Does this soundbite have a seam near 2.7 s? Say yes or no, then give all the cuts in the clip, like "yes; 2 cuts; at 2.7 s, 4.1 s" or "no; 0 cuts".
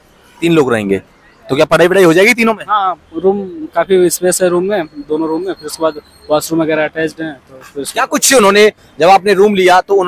no; 0 cuts